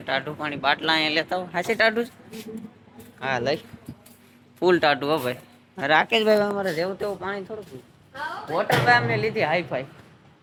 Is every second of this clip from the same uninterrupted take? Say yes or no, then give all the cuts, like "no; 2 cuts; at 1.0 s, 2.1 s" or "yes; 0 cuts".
yes; 0 cuts